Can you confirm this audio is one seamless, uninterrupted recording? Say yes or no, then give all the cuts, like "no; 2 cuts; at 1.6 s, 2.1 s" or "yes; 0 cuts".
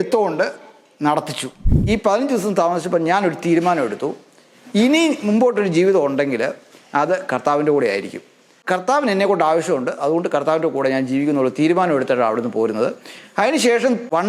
no; 1 cut; at 1.8 s